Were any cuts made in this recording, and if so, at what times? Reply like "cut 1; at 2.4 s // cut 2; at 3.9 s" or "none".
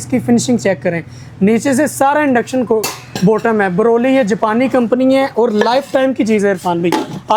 none